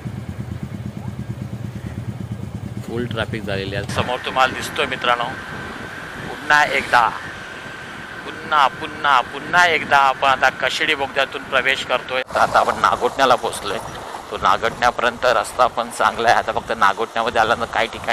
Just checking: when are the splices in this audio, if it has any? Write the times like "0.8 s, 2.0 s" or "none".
3.9 s, 12.3 s